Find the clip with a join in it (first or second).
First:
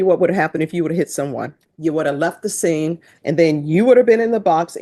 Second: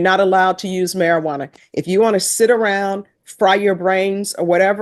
first